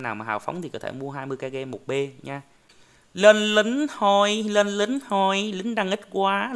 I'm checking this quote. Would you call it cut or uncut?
cut